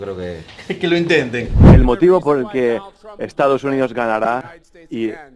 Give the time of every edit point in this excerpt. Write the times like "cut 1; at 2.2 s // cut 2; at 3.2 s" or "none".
cut 1; at 1.6 s